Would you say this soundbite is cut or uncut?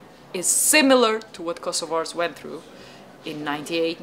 uncut